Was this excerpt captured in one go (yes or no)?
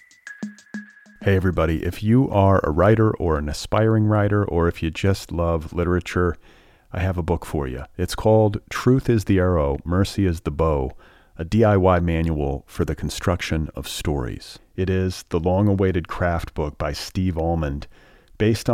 no